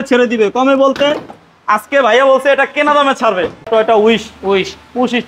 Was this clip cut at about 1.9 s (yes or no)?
no